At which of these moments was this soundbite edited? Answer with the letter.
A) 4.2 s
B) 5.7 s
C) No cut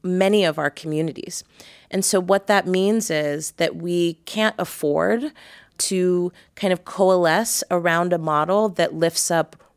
B